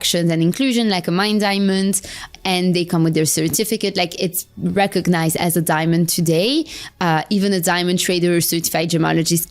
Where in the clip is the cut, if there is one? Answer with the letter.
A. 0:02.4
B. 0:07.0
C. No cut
A